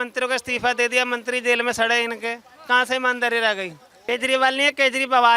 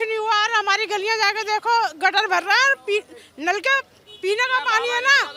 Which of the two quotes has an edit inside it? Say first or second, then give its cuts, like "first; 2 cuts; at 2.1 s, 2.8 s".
first; 1 cut; at 4.0 s